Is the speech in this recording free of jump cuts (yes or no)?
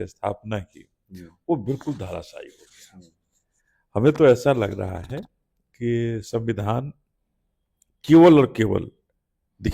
yes